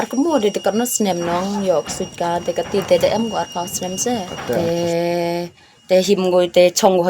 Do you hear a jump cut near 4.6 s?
yes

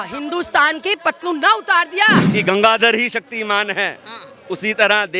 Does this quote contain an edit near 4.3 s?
no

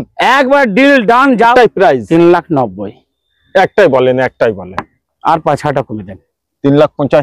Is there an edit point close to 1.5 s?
yes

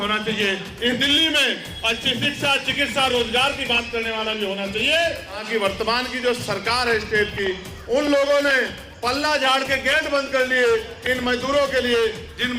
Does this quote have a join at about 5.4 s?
yes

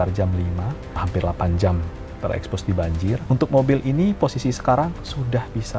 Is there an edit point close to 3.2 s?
yes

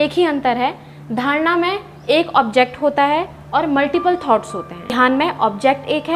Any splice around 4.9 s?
yes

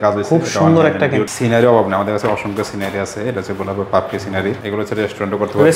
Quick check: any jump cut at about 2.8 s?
no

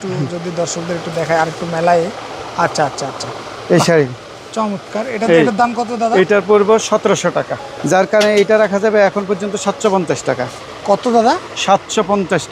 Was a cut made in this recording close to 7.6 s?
yes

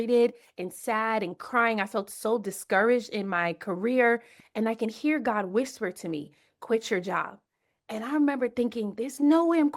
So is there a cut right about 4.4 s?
yes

